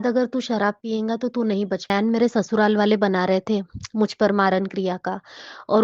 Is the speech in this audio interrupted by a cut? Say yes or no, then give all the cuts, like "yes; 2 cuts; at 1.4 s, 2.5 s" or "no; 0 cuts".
yes; 1 cut; at 1.9 s